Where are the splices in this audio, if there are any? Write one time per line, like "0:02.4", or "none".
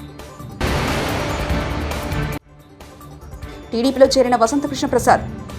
0:03.4